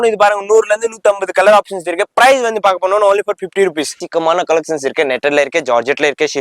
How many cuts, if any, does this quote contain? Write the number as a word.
one